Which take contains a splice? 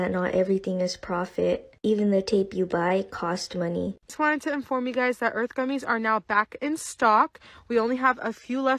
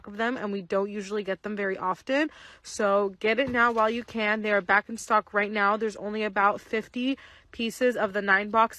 first; 1 cut; at 4.1 s

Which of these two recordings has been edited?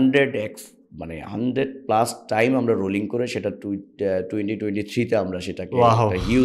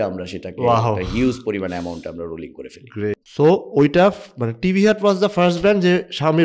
second; 1 cut; at 3.2 s

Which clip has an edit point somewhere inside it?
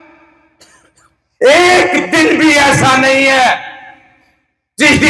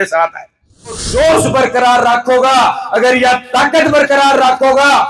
second; 1 cut; at 1.0 s

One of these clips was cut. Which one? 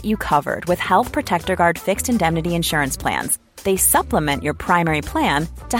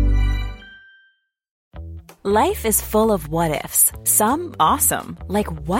second; 1 cut; at 1.5 s

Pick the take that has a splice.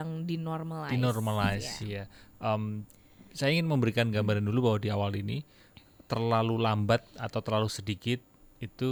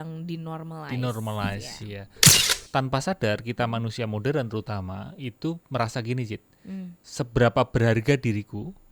second; 2 cuts; at 2.2 s, 7.0 s

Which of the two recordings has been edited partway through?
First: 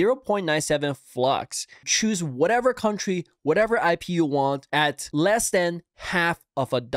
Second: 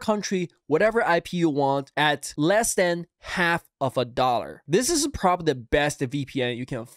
first; 1 cut; at 1.6 s

